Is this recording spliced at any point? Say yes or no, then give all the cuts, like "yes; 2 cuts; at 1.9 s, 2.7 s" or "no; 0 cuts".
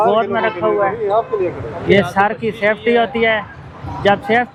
no; 0 cuts